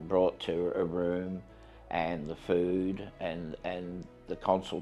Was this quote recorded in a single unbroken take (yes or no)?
yes